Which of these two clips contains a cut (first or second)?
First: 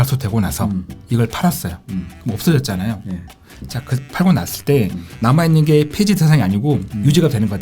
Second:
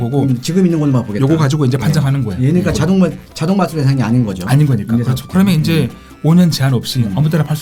first